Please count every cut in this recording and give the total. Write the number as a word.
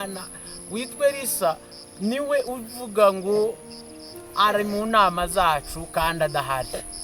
zero